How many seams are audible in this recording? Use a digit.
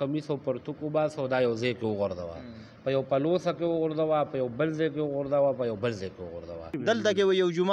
1